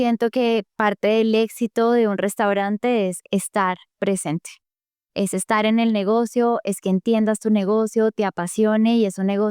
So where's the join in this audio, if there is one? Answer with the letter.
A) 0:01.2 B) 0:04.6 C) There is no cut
C